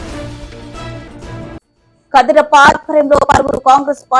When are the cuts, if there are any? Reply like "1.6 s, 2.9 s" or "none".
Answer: 1.2 s